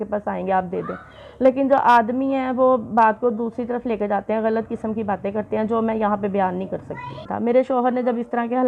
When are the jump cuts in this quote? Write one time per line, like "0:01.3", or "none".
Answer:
0:07.2

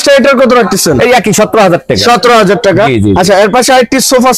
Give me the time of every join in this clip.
none

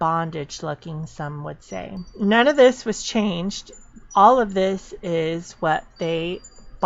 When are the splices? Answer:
0:02.0

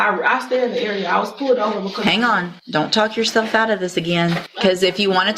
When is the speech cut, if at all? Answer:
0:02.6
0:04.5

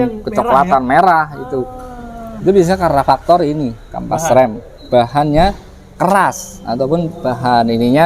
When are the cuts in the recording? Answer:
none

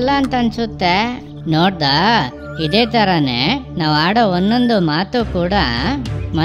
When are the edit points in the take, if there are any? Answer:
0:01.3

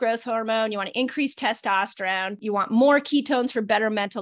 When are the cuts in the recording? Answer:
0:02.4

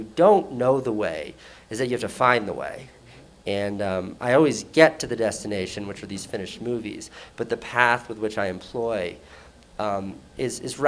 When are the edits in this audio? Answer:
none

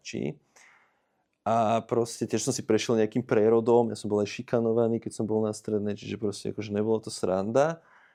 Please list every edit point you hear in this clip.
none

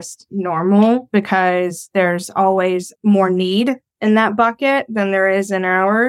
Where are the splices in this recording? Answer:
none

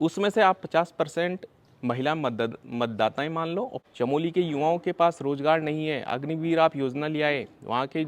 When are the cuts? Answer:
0:03.8

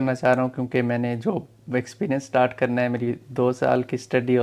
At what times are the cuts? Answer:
none

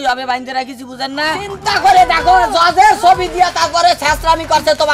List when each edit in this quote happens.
0:01.6

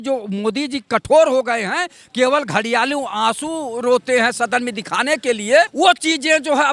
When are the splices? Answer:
0:05.7

